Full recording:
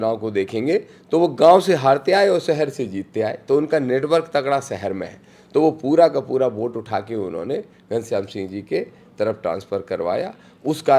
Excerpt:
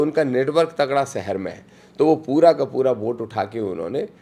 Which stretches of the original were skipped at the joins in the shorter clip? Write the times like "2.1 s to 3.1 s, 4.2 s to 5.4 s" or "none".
none

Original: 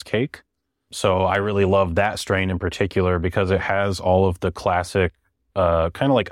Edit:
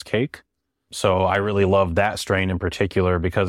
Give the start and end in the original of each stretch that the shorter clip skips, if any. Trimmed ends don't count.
none

